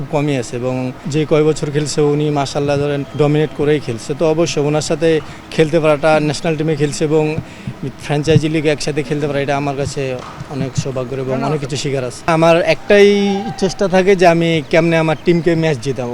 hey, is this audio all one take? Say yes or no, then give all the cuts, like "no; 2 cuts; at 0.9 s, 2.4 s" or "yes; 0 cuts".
no; 3 cuts; at 1.1 s, 3.1 s, 12.3 s